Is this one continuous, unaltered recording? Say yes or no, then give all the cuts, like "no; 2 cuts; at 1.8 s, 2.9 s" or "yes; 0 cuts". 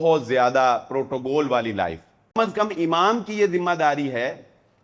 no; 1 cut; at 2.3 s